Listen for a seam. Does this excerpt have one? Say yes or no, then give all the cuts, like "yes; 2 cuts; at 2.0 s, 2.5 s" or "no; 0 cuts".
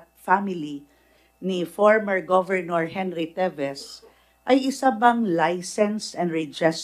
no; 0 cuts